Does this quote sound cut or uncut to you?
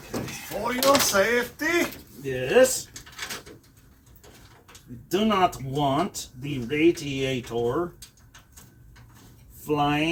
uncut